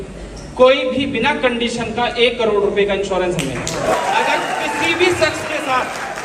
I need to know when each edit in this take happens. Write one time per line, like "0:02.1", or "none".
0:03.7